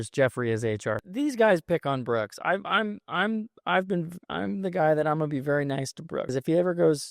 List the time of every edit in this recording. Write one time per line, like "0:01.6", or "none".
0:01.0
0:06.3